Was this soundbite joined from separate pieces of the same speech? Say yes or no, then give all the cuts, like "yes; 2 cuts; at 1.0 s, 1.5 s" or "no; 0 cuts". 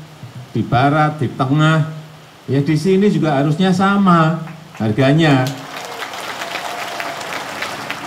no; 0 cuts